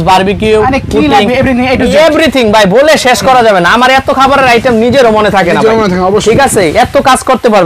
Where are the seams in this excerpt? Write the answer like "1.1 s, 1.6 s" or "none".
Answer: none